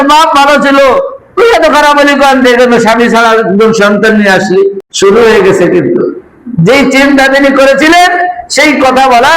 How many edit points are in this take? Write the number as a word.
one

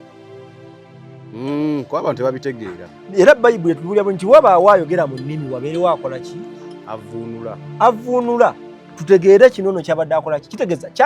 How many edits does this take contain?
one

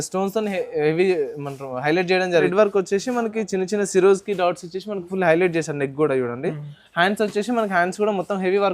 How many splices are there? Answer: one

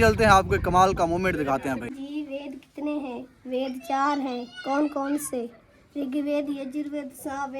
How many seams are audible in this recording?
one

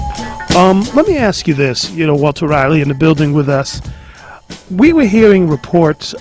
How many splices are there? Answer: one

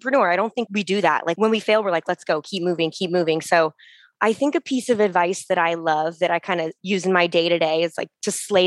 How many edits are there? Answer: two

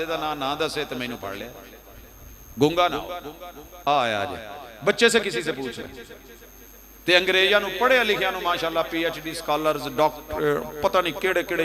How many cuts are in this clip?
one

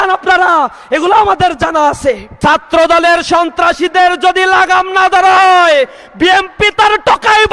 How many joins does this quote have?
one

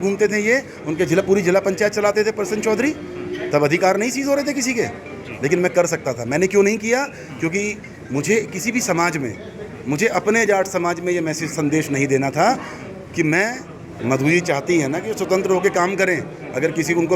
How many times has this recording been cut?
one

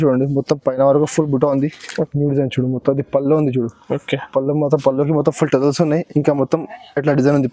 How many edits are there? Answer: one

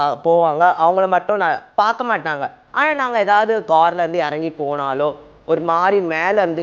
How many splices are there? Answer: two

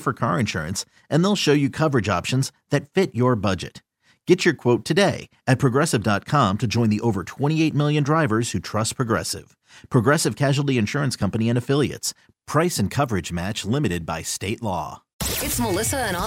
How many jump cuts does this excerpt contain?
one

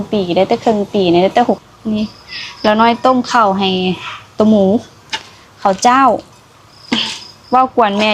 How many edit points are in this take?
one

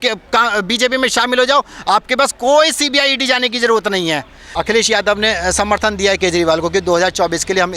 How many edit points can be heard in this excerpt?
one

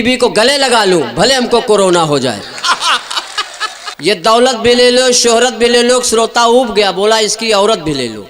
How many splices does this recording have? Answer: one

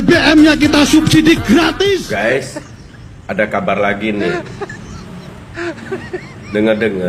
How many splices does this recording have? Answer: one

